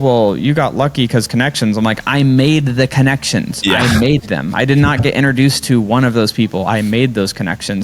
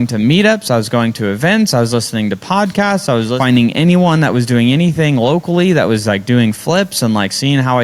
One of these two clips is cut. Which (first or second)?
second